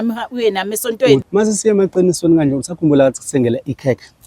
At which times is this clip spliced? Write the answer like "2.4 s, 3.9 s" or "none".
1.3 s